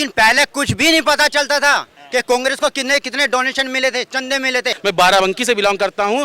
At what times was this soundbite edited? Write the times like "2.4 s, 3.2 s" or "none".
4.7 s